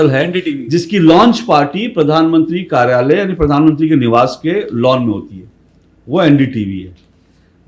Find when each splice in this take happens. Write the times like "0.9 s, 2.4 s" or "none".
none